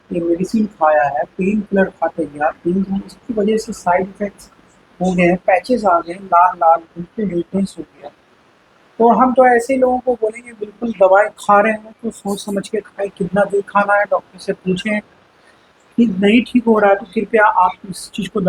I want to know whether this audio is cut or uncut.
uncut